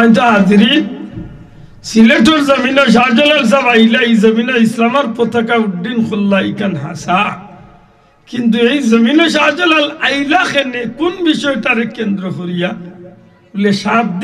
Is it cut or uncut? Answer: uncut